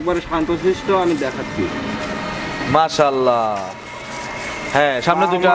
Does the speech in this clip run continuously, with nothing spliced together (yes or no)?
yes